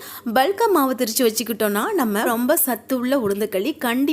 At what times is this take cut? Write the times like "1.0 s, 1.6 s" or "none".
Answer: 2.3 s